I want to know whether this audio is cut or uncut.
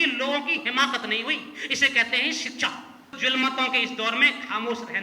cut